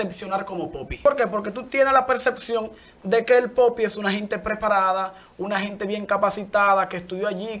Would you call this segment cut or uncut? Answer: cut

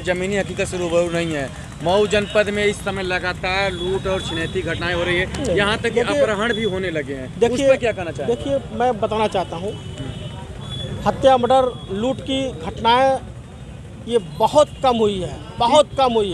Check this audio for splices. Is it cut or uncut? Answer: uncut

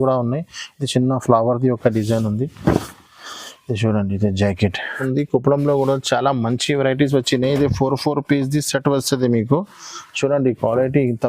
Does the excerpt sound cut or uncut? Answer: cut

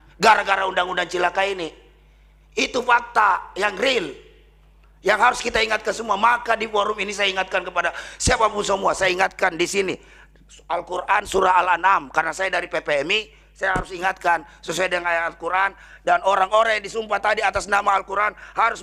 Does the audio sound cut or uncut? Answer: uncut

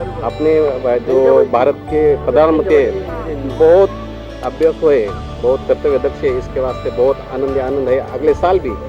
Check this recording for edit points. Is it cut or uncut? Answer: uncut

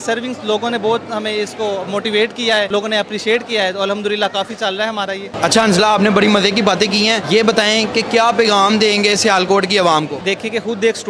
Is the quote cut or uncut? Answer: uncut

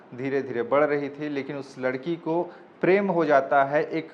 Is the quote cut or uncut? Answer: uncut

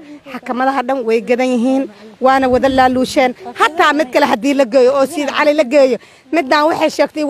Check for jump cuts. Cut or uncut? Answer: uncut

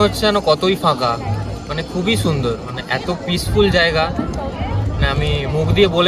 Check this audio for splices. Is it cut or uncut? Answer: uncut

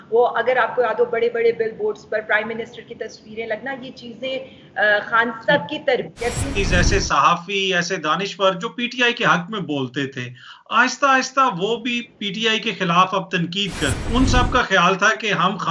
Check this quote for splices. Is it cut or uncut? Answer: cut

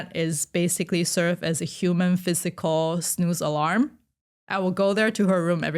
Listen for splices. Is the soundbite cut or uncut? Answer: uncut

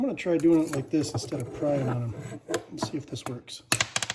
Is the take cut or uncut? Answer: uncut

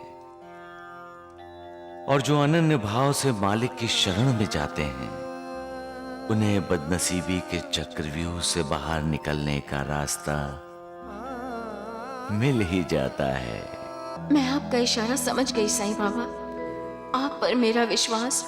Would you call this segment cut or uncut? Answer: cut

